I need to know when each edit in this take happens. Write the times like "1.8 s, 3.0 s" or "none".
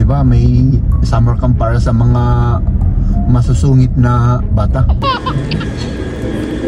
5.0 s